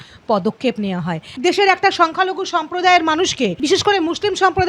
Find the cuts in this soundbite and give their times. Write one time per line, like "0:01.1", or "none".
0:01.3
0:03.6